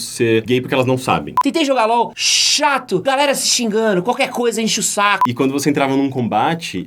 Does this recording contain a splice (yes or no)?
yes